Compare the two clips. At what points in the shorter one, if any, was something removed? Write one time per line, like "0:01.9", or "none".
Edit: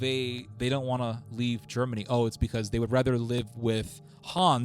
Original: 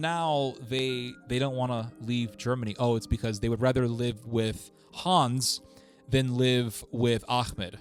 none